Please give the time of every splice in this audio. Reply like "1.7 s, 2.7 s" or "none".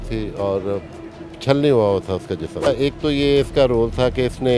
2.7 s

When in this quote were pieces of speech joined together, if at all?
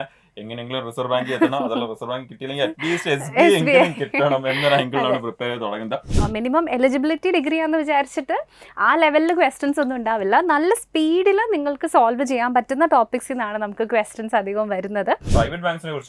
6.1 s, 15.3 s

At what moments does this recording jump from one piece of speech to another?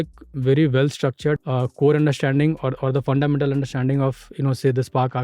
1.4 s

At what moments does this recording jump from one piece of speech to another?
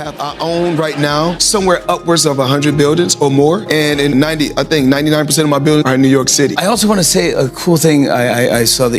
none

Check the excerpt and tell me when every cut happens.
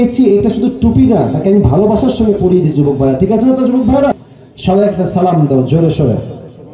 4.1 s

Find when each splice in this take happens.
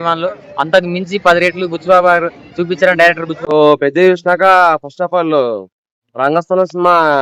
3.3 s

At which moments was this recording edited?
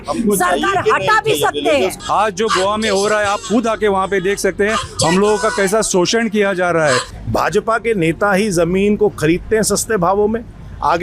2.0 s, 7.1 s

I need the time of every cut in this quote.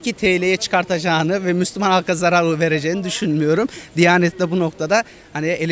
none

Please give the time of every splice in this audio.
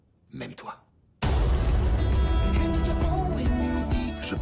1.3 s

